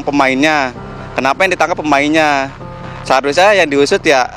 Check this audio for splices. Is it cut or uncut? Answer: uncut